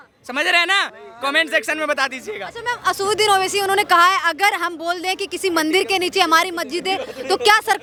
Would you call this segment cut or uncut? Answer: uncut